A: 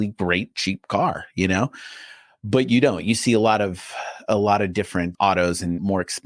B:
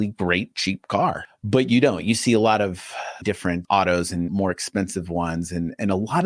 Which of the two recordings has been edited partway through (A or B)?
B